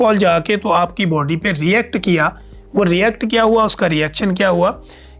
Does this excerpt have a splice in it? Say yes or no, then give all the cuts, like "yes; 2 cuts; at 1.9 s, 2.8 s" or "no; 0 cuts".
no; 0 cuts